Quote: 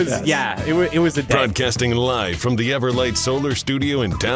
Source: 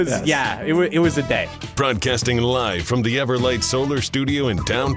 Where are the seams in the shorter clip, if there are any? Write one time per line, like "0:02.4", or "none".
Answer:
0:01.3